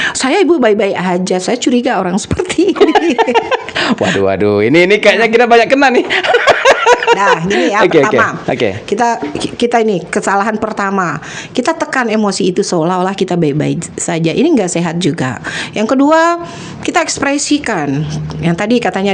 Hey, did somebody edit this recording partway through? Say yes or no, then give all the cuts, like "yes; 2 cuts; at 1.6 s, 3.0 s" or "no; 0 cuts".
no; 0 cuts